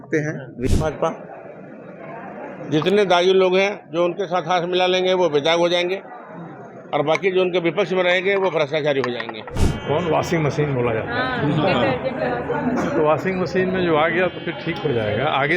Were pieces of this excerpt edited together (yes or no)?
yes